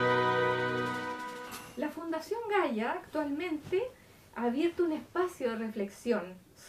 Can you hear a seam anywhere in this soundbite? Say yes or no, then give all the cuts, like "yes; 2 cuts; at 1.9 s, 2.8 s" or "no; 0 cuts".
yes; 1 cut; at 1.4 s